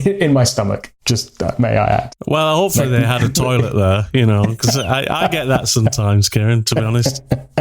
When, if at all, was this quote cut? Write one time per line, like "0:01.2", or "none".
0:00.9